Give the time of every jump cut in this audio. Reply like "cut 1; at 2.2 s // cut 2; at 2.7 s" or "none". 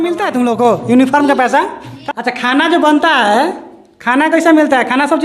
cut 1; at 2.0 s